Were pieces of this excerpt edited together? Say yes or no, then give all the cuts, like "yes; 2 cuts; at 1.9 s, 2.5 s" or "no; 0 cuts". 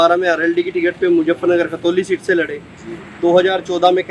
no; 0 cuts